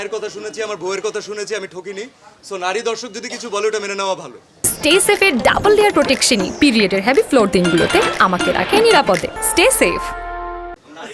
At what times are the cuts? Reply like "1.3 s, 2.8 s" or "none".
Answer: none